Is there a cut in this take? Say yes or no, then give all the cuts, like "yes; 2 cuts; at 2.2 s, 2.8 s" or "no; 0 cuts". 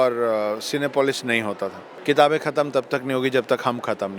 yes; 1 cut; at 1.9 s